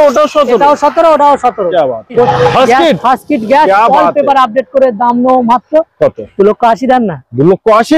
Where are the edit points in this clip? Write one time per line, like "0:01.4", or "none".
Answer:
0:02.3